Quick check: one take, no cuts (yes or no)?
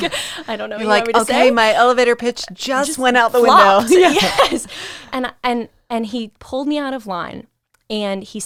yes